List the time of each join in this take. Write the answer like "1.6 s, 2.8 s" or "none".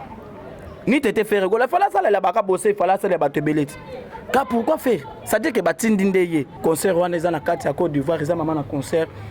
6.5 s